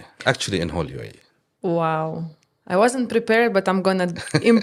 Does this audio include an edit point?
no; 0 cuts

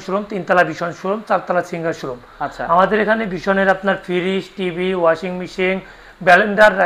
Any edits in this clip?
no; 0 cuts

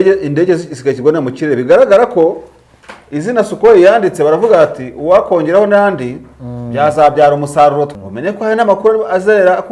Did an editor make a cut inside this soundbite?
yes; 1 cut; at 7.9 s

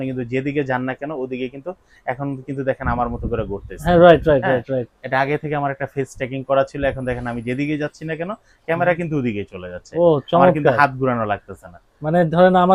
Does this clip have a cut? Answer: no; 0 cuts

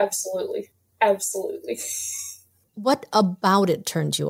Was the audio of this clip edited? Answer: no; 0 cuts

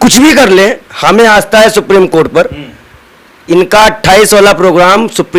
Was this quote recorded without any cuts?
yes; 0 cuts

